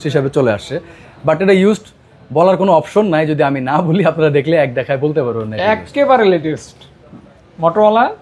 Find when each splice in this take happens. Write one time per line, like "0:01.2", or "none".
none